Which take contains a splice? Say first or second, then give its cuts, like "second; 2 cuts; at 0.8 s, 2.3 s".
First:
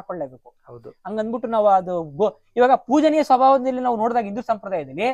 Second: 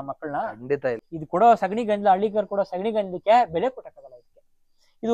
second; 1 cut; at 1.1 s